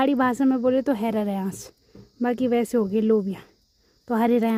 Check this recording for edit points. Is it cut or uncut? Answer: uncut